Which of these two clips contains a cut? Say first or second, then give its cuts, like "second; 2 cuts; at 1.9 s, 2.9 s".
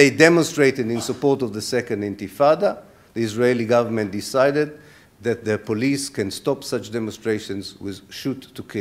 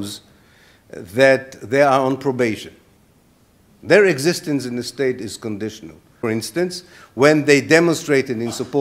second; 1 cut; at 6.0 s